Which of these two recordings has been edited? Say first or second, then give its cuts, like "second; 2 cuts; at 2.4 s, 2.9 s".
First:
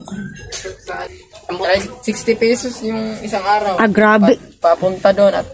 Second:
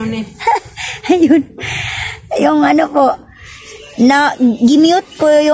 first; 1 cut; at 1.0 s